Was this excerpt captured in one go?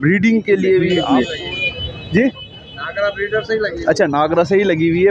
no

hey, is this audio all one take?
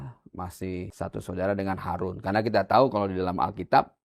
no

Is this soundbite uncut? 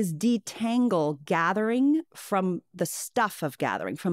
yes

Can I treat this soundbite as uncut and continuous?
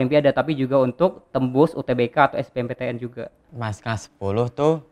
no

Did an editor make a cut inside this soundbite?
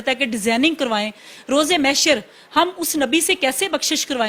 no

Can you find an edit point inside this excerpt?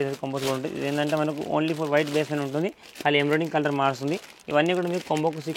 no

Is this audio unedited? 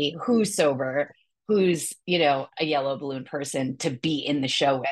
yes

